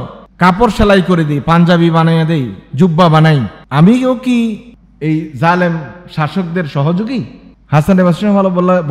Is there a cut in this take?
no; 0 cuts

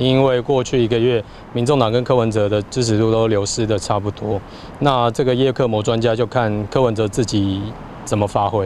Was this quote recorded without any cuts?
yes; 0 cuts

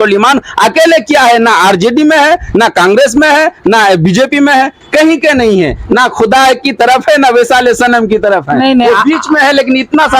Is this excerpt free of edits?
yes; 0 cuts

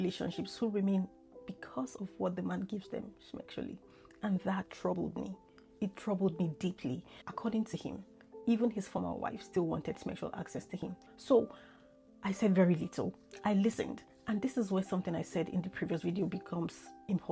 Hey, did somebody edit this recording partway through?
yes; 2 cuts; at 7.1 s, 11.0 s

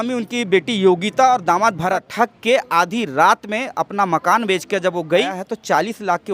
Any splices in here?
yes; 2 cuts; at 2.0 s, 5.4 s

